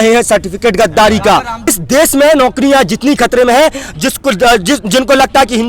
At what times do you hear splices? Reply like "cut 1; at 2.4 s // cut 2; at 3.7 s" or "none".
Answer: cut 1; at 1.8 s